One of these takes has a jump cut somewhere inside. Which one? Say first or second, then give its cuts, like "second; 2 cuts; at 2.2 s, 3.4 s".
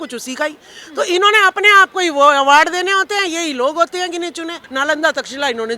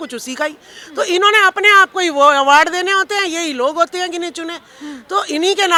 first; 1 cut; at 4.6 s